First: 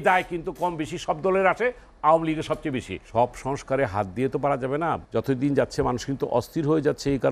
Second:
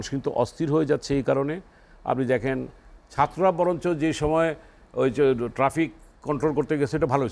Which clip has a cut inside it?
first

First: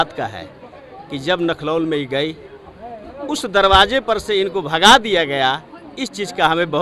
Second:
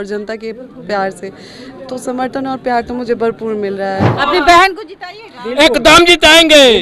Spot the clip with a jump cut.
second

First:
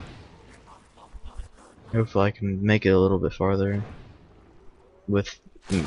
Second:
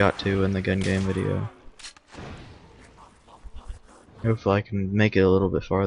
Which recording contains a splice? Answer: second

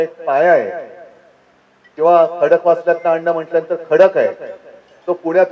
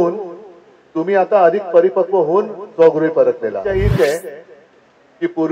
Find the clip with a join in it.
second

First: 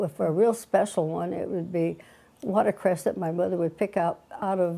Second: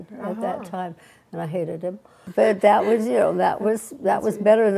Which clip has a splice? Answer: second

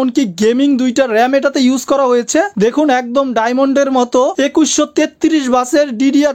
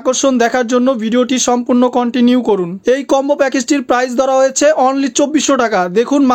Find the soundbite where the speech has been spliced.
second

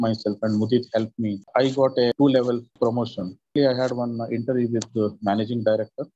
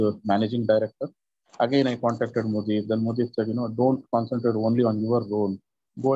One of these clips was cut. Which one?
first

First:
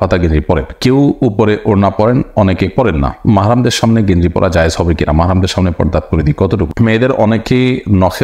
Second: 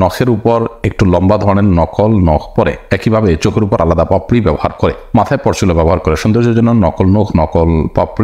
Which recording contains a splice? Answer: first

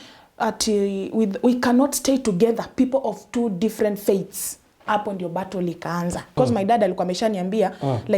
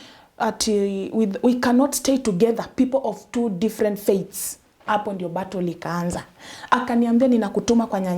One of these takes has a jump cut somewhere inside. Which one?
first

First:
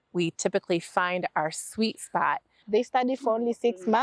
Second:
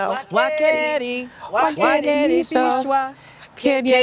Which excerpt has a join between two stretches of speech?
first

